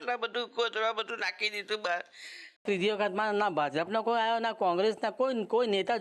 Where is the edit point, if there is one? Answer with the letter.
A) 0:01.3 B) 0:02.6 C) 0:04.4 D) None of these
B